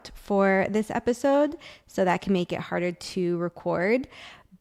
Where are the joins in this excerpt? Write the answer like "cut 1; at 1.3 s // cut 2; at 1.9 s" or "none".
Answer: none